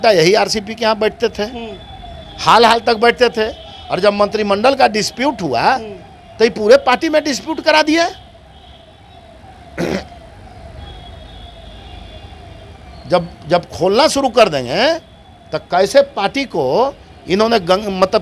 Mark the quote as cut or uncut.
uncut